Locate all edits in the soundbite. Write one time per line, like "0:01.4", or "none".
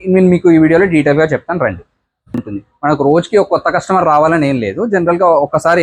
0:02.5